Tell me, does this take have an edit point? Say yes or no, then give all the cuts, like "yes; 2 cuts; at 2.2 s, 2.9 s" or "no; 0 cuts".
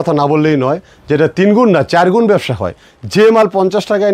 no; 0 cuts